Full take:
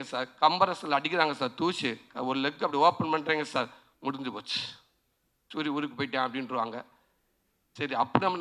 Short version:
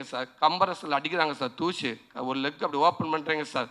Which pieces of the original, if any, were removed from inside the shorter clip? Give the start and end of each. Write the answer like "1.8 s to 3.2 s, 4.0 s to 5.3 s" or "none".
none